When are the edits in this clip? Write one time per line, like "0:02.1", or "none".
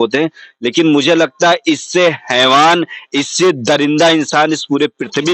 none

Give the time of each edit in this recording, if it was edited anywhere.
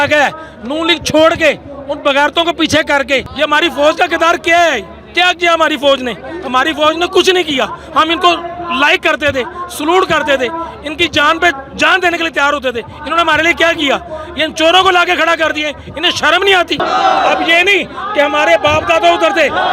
0:03.3
0:16.8

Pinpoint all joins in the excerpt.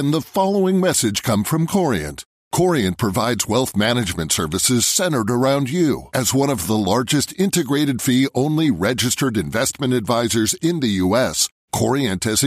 none

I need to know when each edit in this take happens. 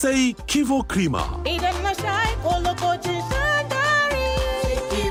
none

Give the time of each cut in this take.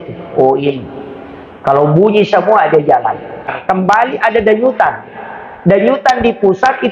0:03.5

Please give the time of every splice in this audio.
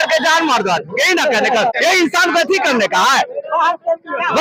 0:01.8

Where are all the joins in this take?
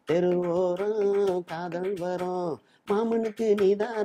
none

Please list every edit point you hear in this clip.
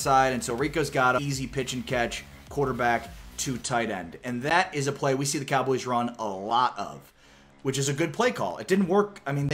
0:01.2

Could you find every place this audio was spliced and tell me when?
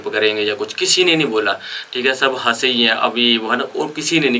none

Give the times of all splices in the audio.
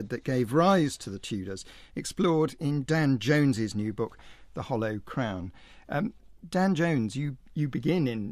0:04.8

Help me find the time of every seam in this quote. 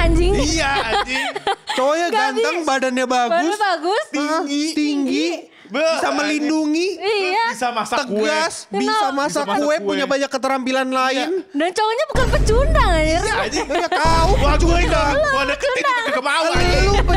none

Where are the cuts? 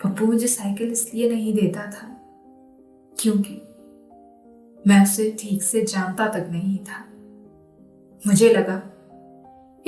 none

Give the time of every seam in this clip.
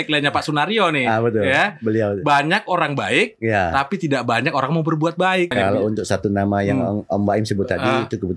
0:05.5

